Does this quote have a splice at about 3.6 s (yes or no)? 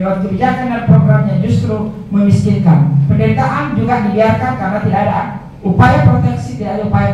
no